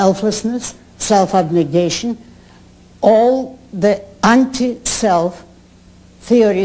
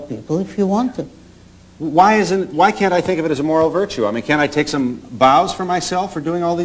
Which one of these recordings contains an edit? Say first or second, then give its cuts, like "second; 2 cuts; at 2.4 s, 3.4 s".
first; 1 cut; at 3.6 s